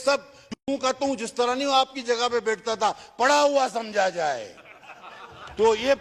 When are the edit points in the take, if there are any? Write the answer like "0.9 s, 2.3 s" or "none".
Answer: none